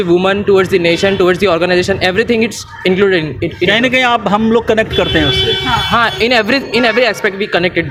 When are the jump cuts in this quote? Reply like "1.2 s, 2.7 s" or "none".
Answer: none